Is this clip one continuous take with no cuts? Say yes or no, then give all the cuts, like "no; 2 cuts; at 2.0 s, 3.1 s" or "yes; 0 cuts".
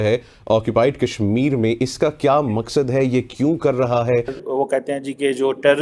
no; 1 cut; at 4.4 s